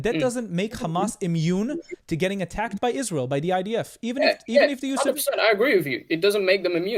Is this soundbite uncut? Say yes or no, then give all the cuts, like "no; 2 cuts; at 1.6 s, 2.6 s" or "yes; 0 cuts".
yes; 0 cuts